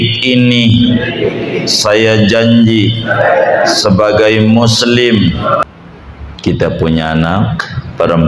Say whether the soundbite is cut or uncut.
cut